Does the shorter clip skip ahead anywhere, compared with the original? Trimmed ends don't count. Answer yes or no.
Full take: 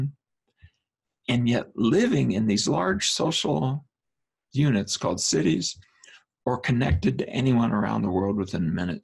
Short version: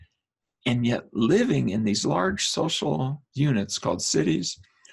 yes